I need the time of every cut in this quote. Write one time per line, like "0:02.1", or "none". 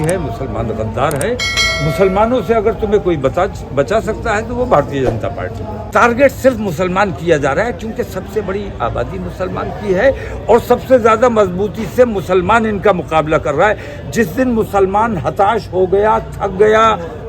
0:05.8